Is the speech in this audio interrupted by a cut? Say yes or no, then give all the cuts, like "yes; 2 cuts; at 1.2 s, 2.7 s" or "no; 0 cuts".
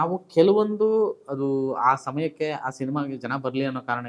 no; 0 cuts